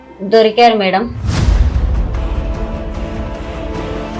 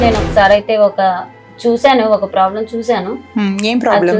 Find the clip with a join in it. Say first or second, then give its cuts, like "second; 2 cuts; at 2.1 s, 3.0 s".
first; 1 cut; at 1.2 s